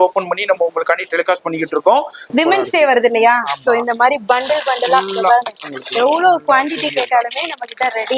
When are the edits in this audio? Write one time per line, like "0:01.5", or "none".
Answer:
0:02.2